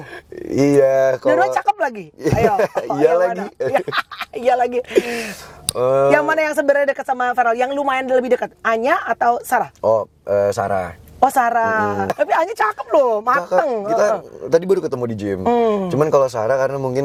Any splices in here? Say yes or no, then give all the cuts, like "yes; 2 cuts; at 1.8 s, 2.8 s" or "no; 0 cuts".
no; 0 cuts